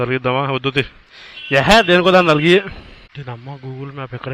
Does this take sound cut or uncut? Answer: cut